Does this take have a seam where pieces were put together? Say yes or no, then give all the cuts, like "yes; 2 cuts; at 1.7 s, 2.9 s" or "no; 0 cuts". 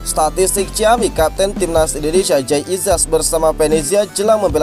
no; 0 cuts